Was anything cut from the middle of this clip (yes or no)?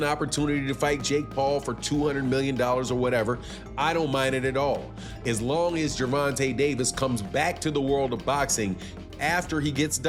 no